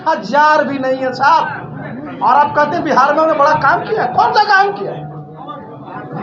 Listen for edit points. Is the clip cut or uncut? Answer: uncut